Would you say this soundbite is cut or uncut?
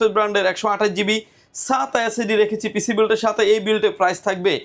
uncut